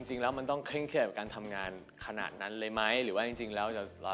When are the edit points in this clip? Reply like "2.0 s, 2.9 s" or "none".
none